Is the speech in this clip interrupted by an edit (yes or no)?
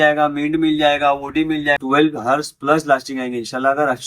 yes